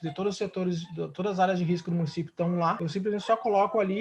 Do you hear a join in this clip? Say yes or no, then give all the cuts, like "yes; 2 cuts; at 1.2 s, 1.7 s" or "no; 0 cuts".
yes; 1 cut; at 2.8 s